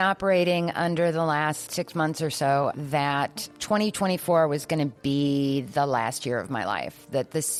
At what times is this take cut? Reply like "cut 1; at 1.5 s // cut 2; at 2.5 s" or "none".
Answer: none